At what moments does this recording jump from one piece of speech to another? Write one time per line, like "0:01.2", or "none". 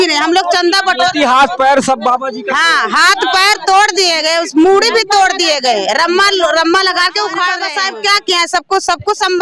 0:07.7